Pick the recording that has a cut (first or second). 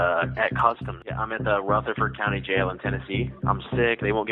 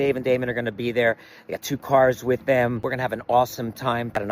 second